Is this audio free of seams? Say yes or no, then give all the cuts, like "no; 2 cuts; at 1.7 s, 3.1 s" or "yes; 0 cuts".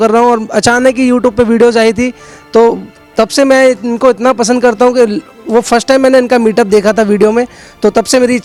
yes; 0 cuts